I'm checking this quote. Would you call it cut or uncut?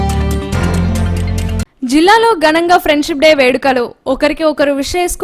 cut